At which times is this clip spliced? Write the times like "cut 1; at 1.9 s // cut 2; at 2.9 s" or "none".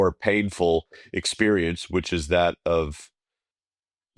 none